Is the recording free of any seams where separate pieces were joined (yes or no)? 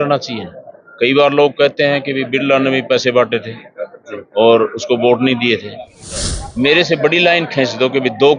no